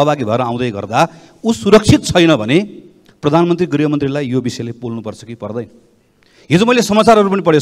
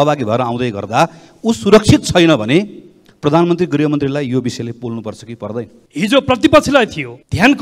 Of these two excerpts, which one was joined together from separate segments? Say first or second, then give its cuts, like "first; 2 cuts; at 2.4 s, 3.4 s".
second; 1 cut; at 5.8 s